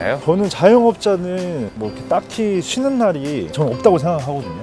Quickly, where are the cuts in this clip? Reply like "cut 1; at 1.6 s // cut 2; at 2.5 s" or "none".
none